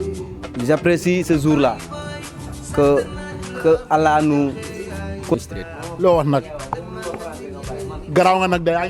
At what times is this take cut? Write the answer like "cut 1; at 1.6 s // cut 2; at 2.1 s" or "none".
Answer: cut 1; at 5.3 s